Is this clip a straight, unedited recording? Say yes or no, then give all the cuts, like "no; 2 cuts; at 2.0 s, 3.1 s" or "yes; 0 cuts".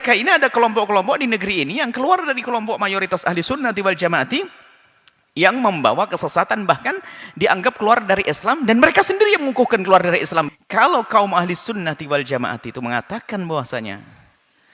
no; 1 cut; at 10.5 s